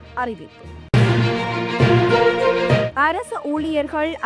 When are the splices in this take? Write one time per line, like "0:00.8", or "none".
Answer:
none